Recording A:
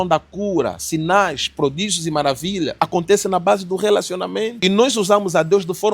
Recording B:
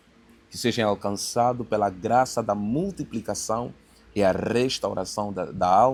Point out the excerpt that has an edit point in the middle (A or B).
A